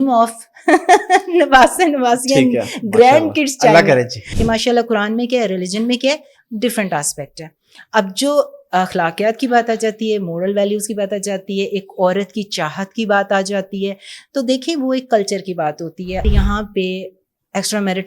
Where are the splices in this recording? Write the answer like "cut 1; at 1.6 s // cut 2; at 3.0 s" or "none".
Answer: cut 1; at 4.2 s // cut 2; at 16.3 s